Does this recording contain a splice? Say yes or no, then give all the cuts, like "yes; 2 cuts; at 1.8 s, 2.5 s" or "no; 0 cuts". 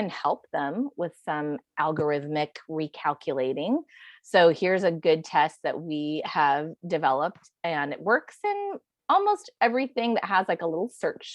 no; 0 cuts